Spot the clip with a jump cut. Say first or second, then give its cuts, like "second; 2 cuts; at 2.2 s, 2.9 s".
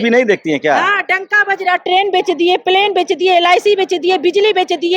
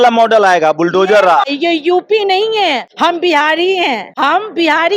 second; 3 cuts; at 1.5 s, 2.9 s, 4.1 s